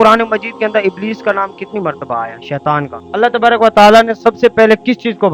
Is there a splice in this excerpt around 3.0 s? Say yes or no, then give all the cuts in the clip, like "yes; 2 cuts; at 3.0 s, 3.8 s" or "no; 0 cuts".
yes; 1 cut; at 3.0 s